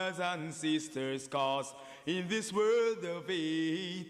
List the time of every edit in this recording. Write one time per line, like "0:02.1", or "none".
none